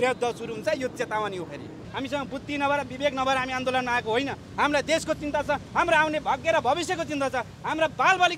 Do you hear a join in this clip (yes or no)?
yes